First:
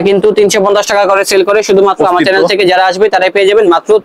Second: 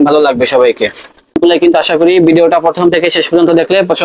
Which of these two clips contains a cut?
second; 1 cut; at 1.4 s

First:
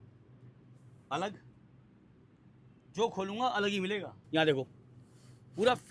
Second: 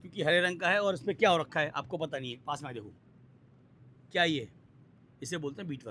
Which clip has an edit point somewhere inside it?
first; 1 cut; at 4.2 s

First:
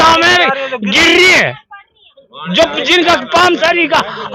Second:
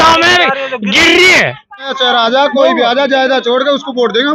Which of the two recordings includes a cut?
second; 1 cut; at 1.9 s

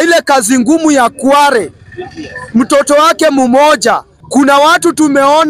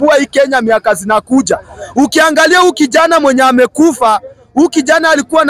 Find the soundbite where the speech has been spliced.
first; 1 cut; at 4.1 s

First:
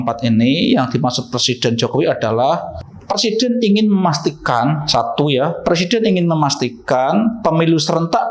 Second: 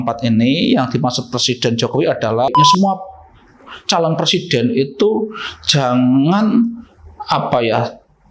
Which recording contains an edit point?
second; 1 cut; at 2.5 s

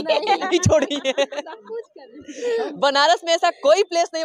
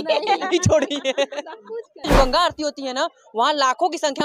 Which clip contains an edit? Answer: second; 1 cut; at 2.0 s

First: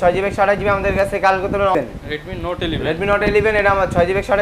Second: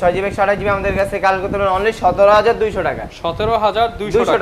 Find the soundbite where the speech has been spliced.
first; 1 cut; at 1.7 s

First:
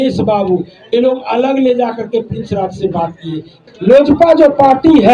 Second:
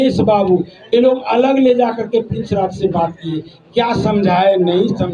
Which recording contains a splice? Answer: first; 1 cut; at 3.6 s

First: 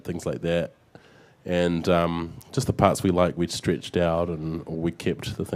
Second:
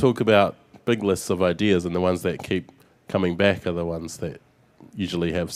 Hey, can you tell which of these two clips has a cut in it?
first; 1 cut; at 3.2 s

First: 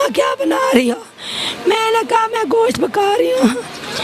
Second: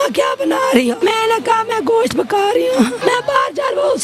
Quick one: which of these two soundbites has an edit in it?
second; 2 cuts; at 1.0 s, 3.0 s

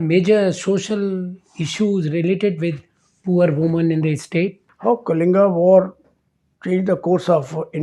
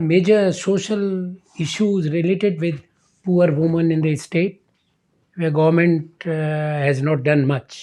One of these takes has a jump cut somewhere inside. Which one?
first; 1 cut; at 4.7 s

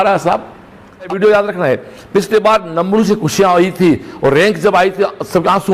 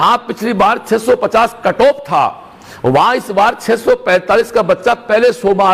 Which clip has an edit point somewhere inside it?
first; 1 cut; at 1.1 s

